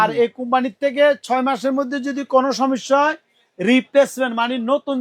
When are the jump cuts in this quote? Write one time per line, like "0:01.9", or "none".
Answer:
none